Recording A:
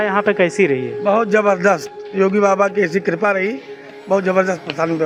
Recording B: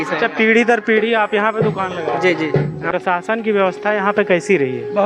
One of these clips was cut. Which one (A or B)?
B